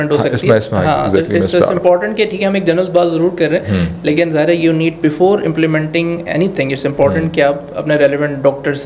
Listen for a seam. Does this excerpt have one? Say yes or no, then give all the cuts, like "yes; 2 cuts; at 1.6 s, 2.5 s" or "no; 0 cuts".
no; 0 cuts